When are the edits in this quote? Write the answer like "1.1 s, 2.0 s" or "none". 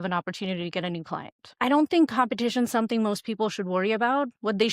1.4 s